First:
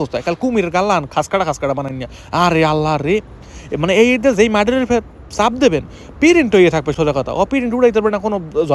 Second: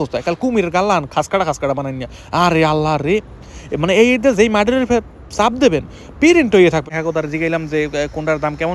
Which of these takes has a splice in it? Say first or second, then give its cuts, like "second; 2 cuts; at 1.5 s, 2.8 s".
second; 1 cut; at 6.9 s